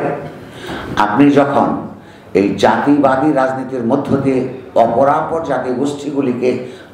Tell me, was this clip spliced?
no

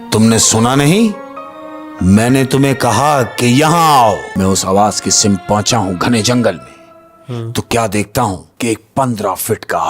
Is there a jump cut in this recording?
yes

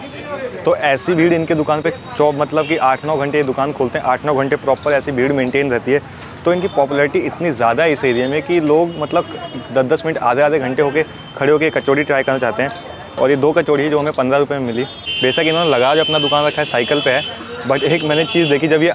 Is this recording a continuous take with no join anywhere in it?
yes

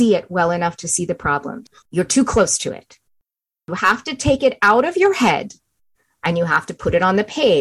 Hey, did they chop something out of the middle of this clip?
yes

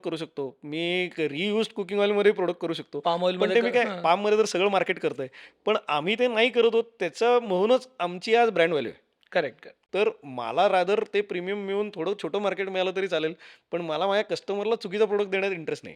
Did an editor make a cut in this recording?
yes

